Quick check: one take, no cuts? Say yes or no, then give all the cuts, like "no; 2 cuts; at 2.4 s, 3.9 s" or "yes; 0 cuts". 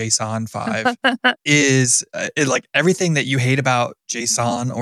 yes; 0 cuts